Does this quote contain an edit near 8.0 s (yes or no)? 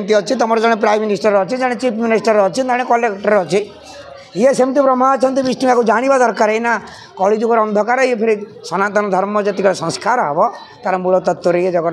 no